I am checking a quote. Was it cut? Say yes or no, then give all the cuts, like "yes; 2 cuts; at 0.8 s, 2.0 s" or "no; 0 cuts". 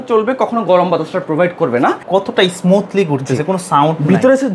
yes; 1 cut; at 2.0 s